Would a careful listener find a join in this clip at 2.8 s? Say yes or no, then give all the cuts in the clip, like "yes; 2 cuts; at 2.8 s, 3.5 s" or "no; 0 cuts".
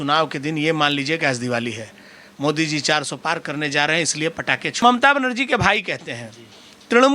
no; 1 cut; at 4.8 s